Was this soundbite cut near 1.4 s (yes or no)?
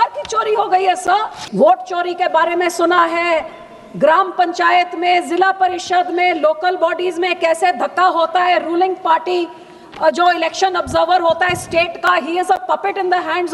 yes